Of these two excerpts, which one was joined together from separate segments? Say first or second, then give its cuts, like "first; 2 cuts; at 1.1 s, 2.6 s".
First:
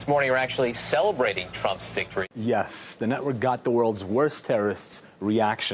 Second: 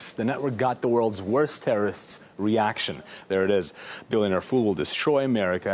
first; 1 cut; at 1.9 s